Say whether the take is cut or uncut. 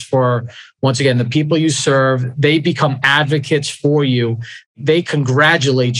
cut